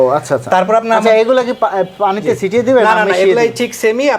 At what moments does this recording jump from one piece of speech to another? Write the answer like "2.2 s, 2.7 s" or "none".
none